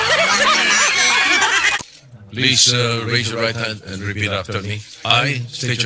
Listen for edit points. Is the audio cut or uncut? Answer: cut